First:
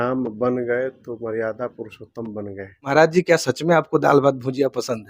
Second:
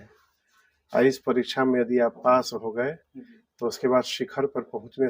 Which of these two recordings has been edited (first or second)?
first